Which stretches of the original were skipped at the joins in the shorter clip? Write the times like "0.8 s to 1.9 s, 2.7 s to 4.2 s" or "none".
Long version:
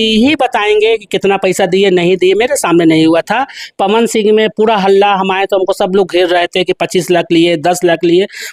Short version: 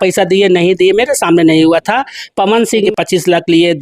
4.3 s to 6.7 s